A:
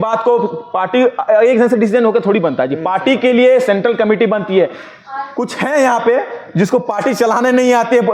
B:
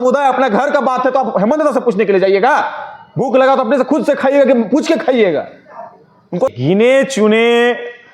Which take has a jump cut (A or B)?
B